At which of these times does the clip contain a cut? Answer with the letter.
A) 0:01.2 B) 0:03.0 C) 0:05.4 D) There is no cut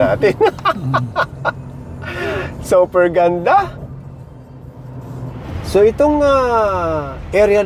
C